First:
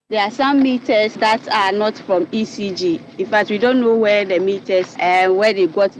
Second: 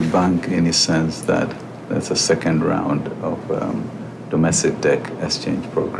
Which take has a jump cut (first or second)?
first